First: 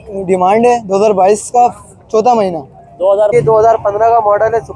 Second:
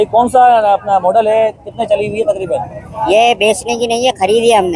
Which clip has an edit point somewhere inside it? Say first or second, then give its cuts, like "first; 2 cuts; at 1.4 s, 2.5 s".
first; 1 cut; at 3.3 s